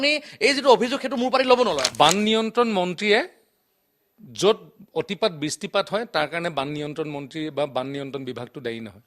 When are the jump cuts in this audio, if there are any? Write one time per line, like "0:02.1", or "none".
0:01.9

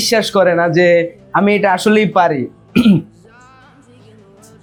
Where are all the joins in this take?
none

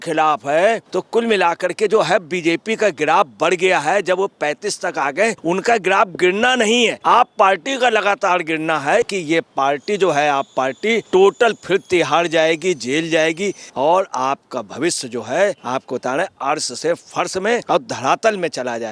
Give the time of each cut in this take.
0:00.9
0:05.4
0:07.0
0:09.1
0:11.0
0:13.6
0:15.6
0:17.6

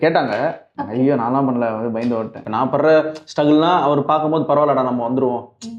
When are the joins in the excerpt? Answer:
0:02.4

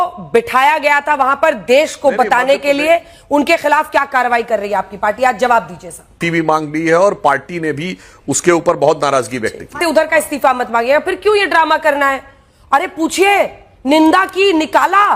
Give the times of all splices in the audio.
0:06.2
0:09.8

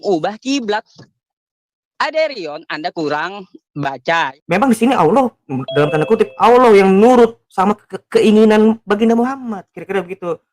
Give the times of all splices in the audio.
0:04.3

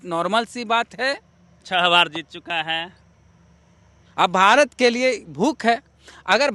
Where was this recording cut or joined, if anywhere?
none

